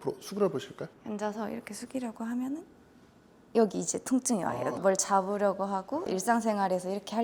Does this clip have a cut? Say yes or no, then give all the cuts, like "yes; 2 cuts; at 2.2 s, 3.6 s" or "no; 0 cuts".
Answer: no; 0 cuts